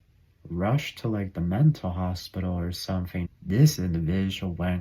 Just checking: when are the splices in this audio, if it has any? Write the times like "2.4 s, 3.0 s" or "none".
3.3 s